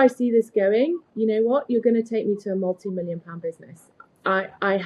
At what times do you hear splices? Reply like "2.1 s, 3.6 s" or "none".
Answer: none